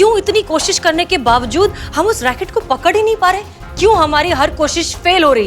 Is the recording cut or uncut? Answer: uncut